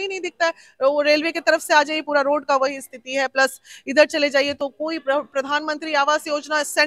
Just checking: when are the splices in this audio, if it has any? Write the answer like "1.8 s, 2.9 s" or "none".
none